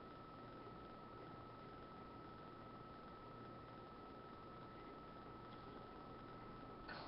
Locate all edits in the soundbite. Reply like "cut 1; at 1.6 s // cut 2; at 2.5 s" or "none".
none